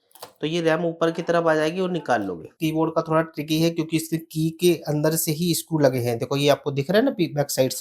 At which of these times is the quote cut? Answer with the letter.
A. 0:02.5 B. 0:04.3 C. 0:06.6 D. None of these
A